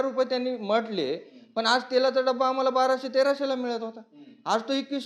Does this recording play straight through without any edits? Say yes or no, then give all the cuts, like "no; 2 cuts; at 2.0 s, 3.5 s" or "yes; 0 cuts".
yes; 0 cuts